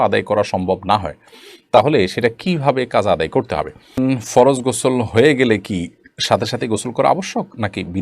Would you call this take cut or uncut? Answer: cut